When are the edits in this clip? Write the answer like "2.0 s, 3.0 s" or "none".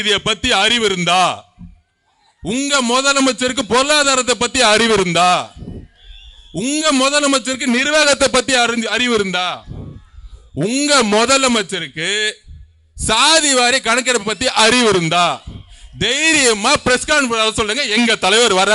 none